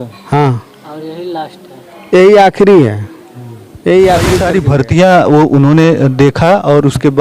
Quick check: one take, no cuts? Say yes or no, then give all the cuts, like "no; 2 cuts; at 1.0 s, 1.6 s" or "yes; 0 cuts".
no; 1 cut; at 4.4 s